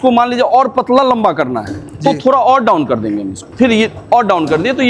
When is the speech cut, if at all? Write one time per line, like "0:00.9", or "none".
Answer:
0:03.4